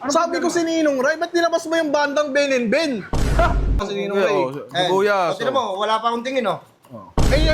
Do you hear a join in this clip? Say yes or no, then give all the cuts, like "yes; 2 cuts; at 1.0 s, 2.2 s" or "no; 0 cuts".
yes; 1 cut; at 3.9 s